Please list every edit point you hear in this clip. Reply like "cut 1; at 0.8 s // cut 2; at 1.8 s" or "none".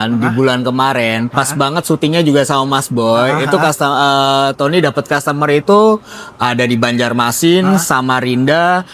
none